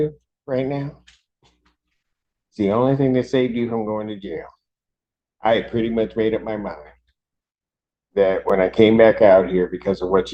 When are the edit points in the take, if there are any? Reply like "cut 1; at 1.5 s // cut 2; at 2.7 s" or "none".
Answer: none